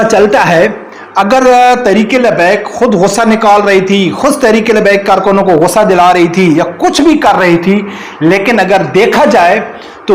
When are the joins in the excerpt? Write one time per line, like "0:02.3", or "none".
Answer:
none